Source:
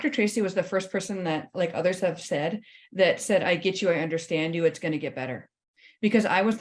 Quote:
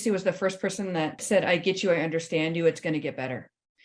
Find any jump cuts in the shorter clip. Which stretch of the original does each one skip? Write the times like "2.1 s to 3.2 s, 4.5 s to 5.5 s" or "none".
1.5 s to 3.2 s